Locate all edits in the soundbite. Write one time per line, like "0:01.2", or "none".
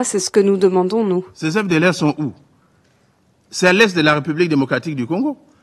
0:01.3